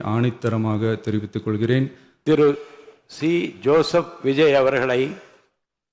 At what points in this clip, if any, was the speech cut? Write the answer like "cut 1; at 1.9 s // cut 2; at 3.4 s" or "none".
cut 1; at 2.1 s